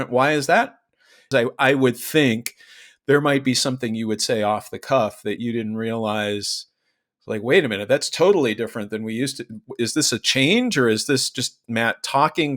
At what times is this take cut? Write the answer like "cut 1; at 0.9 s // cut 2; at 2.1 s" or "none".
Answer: cut 1; at 1.2 s